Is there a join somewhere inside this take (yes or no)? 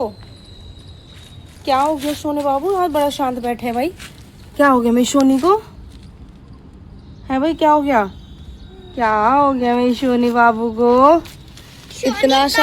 no